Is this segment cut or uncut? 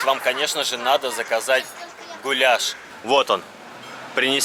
uncut